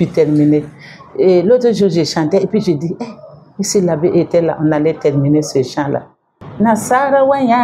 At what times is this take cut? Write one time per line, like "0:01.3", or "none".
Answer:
0:06.4